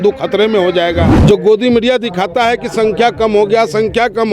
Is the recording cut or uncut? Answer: cut